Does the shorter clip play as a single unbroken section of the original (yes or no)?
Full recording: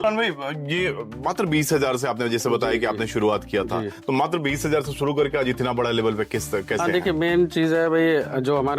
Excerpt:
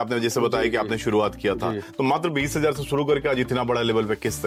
yes